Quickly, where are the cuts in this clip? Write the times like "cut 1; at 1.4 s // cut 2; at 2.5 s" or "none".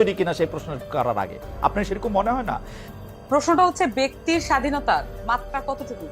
cut 1; at 2.7 s